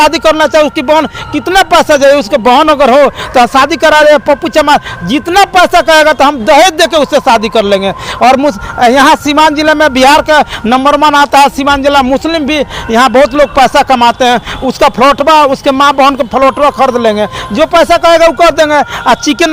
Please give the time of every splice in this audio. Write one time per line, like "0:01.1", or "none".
none